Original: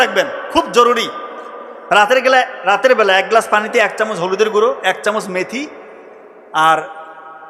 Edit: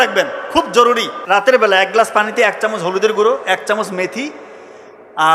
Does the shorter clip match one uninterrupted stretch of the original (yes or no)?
no